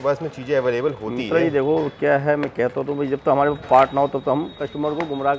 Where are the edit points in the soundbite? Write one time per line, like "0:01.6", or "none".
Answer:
none